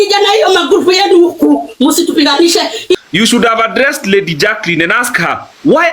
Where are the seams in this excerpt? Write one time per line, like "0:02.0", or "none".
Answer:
0:03.0